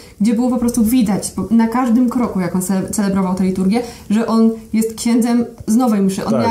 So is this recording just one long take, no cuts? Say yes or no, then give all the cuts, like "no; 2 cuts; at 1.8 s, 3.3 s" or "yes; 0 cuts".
yes; 0 cuts